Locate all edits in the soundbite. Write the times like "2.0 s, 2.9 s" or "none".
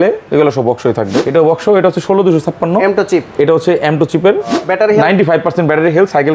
1.2 s, 4.6 s